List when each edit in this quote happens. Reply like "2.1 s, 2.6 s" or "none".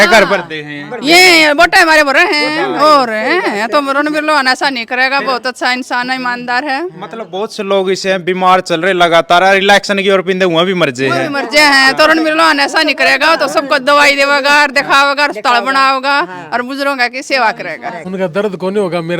18.0 s